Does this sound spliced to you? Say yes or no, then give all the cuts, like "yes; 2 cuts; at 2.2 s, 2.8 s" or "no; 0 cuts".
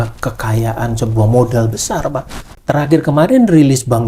yes; 1 cut; at 2.5 s